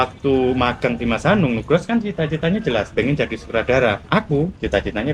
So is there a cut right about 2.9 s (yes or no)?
yes